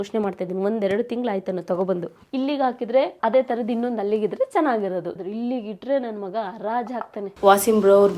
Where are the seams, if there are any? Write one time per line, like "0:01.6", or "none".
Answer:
0:05.1
0:07.4